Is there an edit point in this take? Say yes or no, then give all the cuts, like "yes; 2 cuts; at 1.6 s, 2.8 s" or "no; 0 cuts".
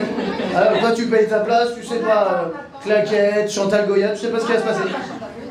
no; 0 cuts